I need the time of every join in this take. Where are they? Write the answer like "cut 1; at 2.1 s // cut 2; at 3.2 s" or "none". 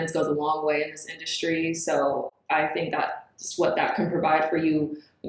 none